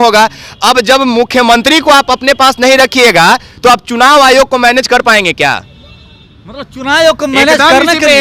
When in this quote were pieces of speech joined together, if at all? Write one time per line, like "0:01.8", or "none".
none